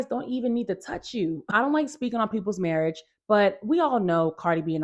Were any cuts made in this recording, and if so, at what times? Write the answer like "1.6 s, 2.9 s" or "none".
1.5 s